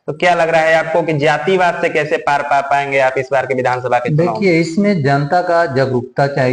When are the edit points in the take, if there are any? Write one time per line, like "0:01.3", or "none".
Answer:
none

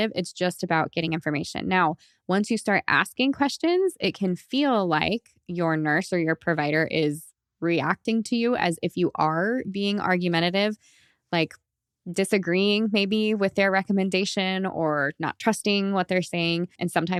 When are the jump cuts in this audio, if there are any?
none

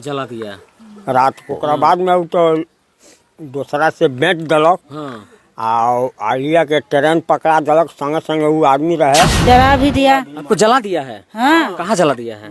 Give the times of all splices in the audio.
0:01.5
0:09.4

